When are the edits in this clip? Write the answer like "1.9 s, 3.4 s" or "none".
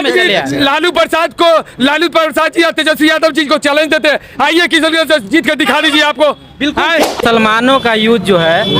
7.2 s